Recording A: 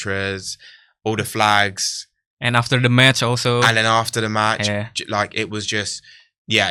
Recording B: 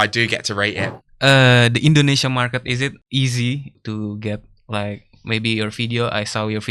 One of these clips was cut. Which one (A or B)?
B